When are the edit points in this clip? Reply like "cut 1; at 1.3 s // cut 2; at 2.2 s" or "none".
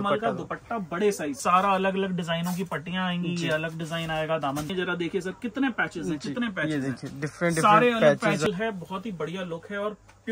cut 1; at 1.4 s // cut 2; at 4.7 s // cut 3; at 8.5 s